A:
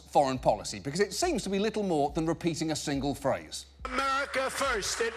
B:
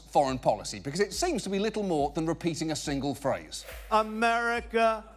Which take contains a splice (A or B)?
B